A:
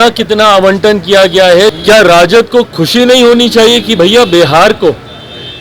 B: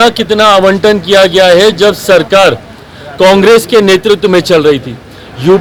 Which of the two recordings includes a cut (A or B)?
A